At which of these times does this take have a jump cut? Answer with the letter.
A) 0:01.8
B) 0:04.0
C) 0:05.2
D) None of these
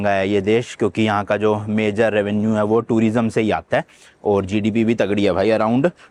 D